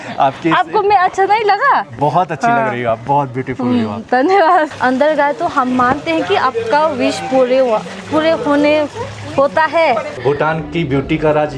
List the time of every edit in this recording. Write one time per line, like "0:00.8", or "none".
0:04.7
0:10.2